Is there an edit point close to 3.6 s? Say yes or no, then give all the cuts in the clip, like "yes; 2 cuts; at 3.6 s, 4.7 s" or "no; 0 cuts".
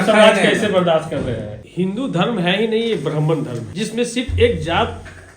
yes; 2 cuts; at 1.6 s, 3.6 s